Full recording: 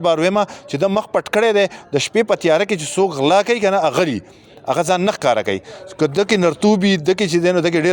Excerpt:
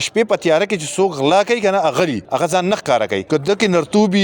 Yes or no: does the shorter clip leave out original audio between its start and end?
yes